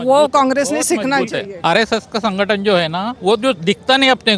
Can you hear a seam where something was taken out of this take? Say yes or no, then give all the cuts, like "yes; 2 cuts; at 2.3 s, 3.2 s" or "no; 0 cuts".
yes; 2 cuts; at 1.5 s, 3.1 s